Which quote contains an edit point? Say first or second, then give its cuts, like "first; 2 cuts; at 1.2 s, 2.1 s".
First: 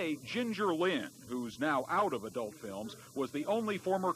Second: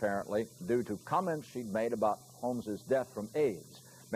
second; 1 cut; at 2.2 s